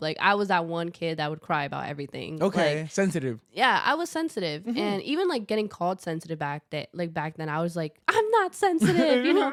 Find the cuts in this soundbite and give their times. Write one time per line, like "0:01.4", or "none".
none